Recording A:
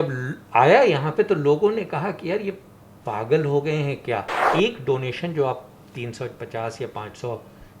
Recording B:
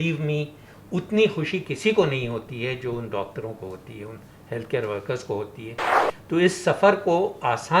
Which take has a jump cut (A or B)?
A